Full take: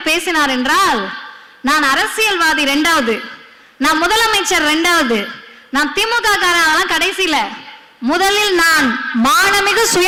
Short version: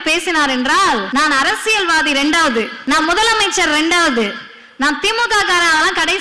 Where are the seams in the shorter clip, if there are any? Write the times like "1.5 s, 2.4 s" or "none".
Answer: 1.1 s, 2.7 s